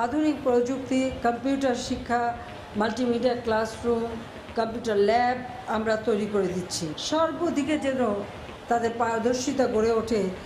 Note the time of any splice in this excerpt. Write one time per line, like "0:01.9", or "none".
0:06.9